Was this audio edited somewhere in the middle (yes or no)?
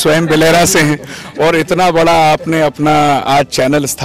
no